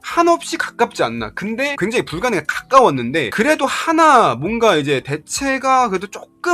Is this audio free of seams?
yes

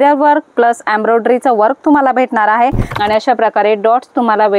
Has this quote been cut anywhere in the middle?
yes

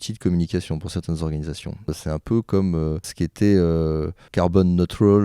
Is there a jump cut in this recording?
yes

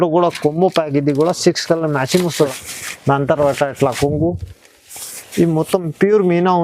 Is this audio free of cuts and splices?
no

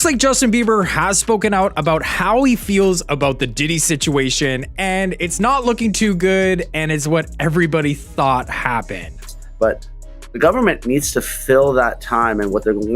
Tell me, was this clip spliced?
yes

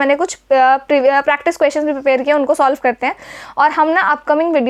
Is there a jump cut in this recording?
no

